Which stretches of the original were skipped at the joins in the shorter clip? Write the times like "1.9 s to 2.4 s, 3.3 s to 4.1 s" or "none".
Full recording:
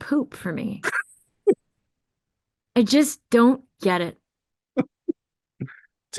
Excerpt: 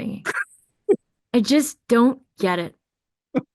1.7 s to 2.6 s